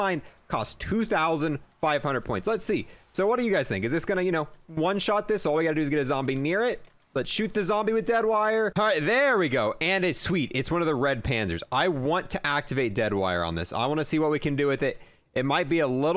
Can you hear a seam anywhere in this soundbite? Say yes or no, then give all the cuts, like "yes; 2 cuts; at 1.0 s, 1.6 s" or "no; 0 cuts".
yes; 1 cut; at 8.7 s